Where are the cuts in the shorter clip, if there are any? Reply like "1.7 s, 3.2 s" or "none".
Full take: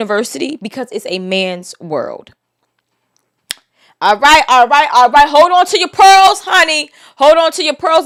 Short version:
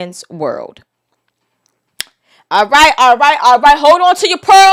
none